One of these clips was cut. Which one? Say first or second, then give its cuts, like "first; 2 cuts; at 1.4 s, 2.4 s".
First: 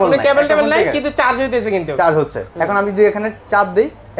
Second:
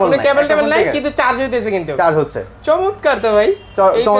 first; 1 cut; at 2.4 s